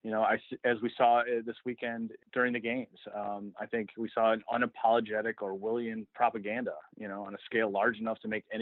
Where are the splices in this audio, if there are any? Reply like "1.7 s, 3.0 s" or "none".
2.2 s